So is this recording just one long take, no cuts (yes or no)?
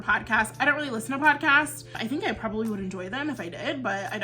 no